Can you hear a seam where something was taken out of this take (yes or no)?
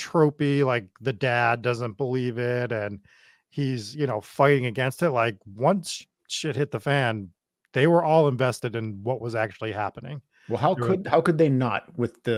no